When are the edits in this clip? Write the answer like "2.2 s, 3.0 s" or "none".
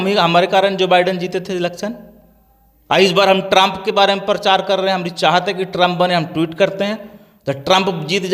none